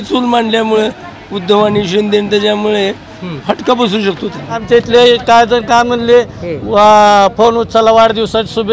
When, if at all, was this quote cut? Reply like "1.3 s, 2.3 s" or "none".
4.6 s